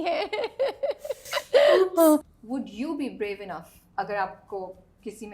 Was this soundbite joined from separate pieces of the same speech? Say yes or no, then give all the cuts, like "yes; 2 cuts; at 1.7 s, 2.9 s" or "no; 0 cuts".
yes; 2 cuts; at 2.4 s, 3.8 s